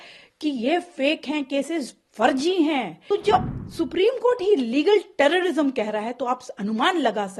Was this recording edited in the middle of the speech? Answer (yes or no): yes